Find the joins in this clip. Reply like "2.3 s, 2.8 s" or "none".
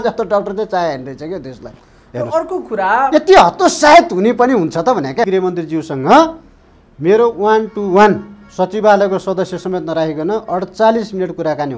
5.3 s